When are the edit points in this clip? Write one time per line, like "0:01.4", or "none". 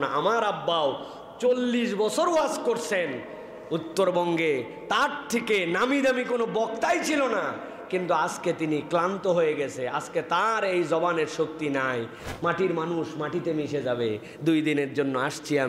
0:12.2